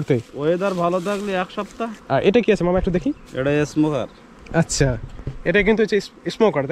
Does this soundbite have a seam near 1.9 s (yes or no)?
yes